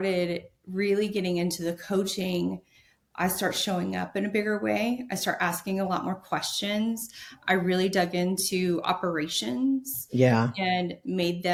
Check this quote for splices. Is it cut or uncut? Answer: uncut